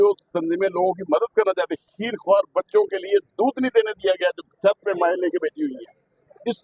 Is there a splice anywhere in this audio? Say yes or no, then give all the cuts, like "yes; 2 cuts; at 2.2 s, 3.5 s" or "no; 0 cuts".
no; 0 cuts